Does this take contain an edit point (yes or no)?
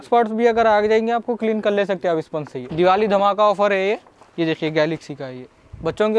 yes